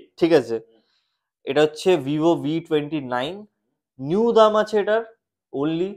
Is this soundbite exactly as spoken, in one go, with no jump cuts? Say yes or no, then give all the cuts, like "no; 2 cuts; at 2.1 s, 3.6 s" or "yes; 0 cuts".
yes; 0 cuts